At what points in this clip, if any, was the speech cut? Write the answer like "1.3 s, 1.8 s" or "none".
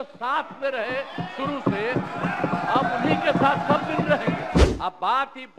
4.6 s